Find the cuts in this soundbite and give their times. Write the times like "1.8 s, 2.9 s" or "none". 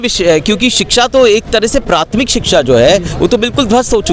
none